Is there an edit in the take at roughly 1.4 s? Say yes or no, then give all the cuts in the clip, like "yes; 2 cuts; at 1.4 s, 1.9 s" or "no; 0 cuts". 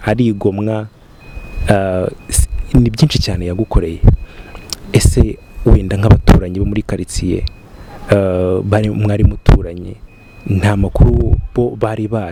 no; 0 cuts